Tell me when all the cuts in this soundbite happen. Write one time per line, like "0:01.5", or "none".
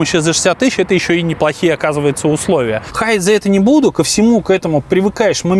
0:02.9